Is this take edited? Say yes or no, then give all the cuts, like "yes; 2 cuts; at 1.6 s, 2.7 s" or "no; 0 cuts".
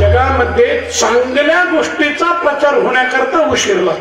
no; 0 cuts